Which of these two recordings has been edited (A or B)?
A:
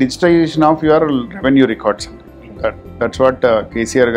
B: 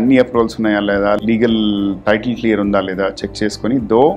B